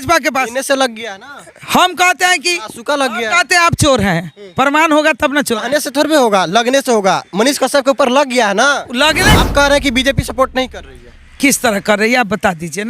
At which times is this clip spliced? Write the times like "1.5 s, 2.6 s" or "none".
9.4 s

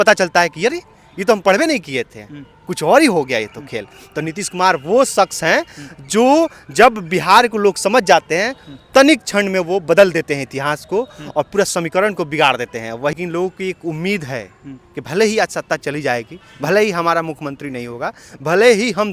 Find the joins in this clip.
13.1 s

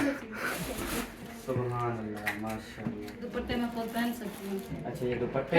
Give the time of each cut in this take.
3.2 s

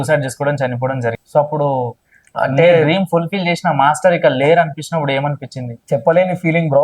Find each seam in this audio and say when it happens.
1.2 s, 5.7 s

